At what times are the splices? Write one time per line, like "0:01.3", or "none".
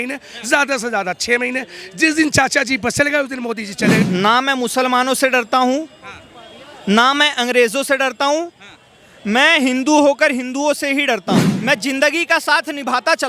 0:04.0
0:11.5